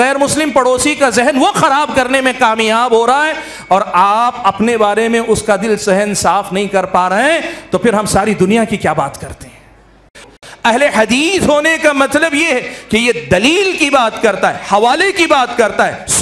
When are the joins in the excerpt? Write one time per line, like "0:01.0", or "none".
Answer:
0:10.5